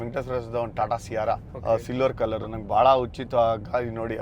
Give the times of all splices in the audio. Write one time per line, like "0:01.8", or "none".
0:01.5